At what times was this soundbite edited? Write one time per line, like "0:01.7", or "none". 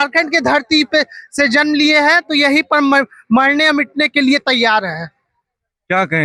none